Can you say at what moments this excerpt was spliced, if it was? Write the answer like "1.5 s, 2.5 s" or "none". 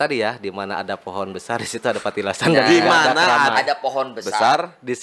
none